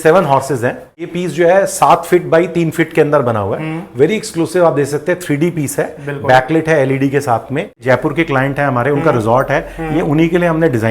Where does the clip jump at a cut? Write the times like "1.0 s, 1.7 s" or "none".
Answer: 1.1 s, 7.8 s